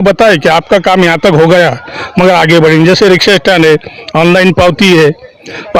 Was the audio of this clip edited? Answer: no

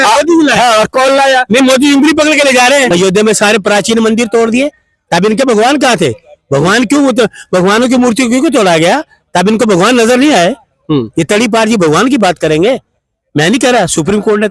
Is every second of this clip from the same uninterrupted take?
no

